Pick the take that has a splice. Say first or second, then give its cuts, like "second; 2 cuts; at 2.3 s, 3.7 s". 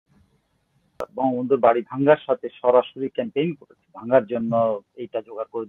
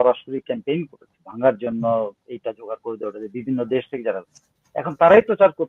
first; 1 cut; at 1.1 s